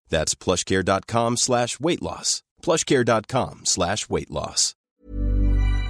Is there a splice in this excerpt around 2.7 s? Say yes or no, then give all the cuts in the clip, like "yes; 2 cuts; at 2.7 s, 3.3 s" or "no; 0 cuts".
no; 1 cut; at 4.9 s